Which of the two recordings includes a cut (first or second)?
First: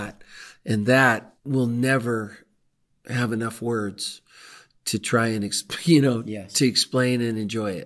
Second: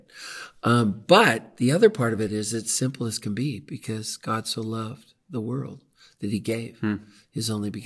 first